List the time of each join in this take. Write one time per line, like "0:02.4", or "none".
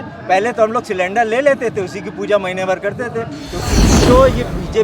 0:03.7